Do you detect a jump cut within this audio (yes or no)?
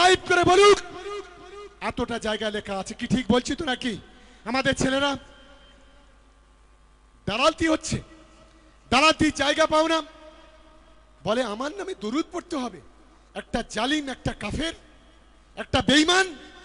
no